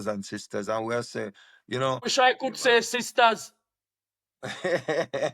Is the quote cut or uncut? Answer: cut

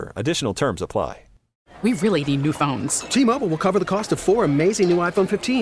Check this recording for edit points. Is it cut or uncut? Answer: cut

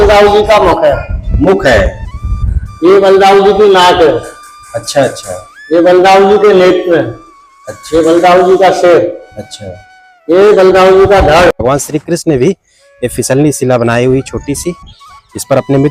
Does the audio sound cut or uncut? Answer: cut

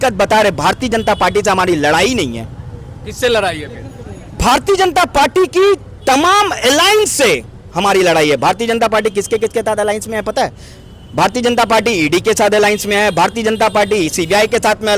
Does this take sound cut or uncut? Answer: uncut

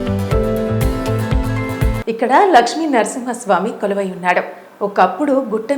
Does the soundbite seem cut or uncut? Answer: uncut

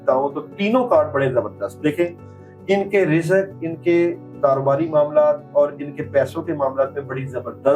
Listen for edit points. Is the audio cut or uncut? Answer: uncut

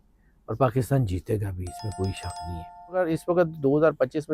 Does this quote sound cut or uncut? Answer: cut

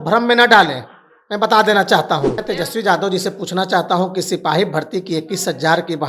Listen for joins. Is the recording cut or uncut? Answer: cut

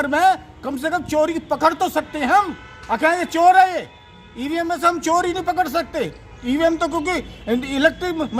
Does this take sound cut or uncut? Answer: uncut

